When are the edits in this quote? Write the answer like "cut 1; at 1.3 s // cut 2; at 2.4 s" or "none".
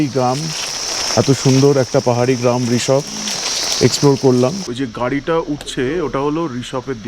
cut 1; at 4.6 s